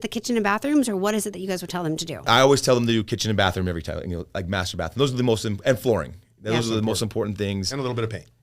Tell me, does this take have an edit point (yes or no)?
yes